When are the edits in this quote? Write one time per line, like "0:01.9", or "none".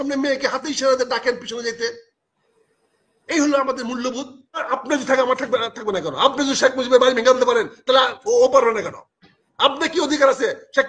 0:04.7